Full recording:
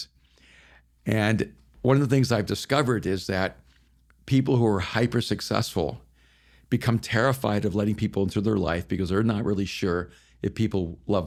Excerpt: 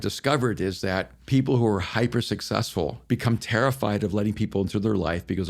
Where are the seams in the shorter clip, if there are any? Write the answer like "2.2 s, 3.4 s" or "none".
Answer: 1.2 s, 3.0 s